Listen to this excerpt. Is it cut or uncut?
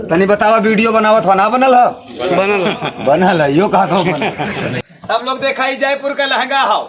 cut